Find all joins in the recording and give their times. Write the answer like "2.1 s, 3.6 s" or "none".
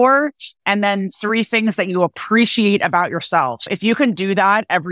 3.7 s